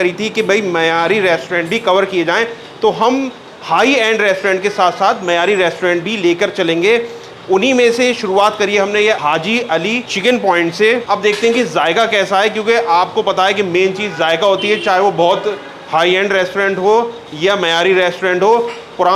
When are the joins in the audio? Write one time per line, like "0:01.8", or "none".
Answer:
none